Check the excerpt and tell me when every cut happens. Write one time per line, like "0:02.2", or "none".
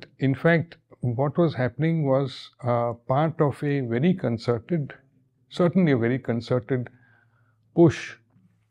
none